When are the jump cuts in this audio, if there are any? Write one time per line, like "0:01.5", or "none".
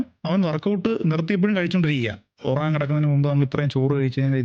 0:02.4